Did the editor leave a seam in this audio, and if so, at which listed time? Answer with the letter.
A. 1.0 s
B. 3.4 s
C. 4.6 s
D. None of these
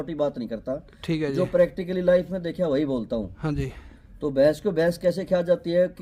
D